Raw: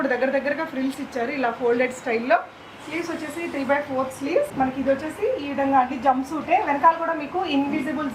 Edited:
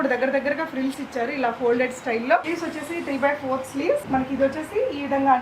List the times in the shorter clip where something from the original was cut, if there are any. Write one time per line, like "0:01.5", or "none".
0:02.5